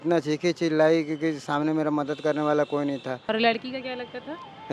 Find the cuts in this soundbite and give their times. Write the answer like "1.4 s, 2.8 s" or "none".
3.2 s